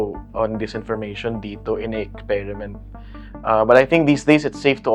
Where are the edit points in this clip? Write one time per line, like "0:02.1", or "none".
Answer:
none